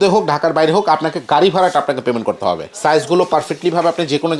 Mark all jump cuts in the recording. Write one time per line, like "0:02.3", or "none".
0:02.7